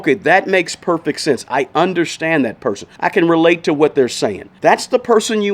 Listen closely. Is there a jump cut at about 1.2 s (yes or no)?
no